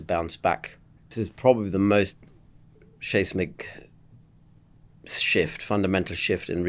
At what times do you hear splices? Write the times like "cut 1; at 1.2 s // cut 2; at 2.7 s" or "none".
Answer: cut 1; at 1.1 s